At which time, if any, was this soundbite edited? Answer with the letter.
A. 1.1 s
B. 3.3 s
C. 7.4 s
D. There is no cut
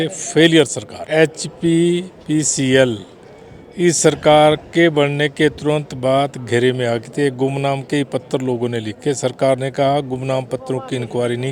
A